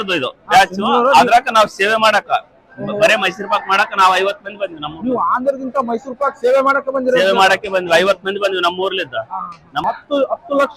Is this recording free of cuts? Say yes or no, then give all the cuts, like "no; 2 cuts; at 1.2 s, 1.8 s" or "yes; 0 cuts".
no; 1 cut; at 9.8 s